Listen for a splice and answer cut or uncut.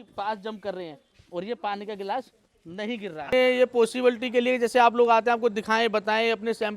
cut